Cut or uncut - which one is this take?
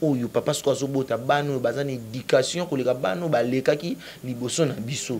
uncut